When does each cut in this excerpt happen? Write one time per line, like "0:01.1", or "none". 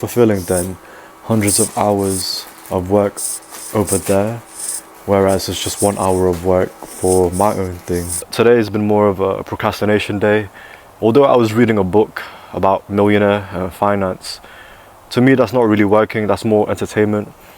0:08.3